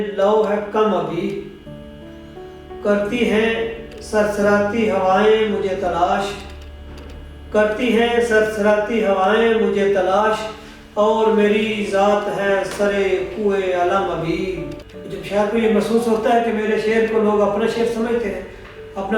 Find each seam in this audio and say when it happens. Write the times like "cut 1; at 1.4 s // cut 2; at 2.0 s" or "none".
cut 1; at 15.4 s